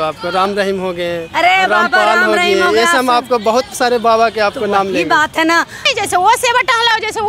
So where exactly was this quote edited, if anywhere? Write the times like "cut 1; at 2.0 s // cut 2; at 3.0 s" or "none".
cut 1; at 5.8 s